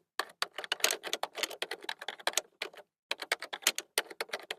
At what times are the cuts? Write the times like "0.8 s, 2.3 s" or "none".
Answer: none